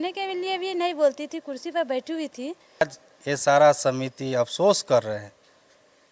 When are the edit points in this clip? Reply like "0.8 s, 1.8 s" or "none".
2.8 s